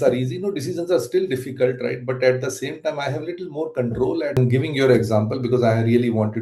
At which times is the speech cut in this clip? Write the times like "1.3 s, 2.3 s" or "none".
4.4 s